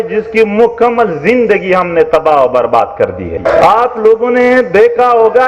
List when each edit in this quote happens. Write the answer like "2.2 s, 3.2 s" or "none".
3.3 s